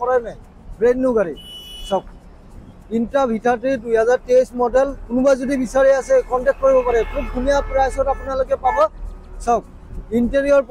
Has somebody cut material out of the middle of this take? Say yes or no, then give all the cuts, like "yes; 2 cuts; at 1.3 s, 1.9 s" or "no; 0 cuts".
no; 0 cuts